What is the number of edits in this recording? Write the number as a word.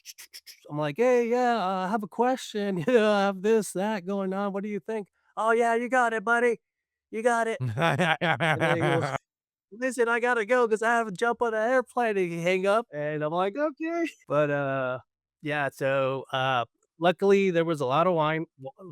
two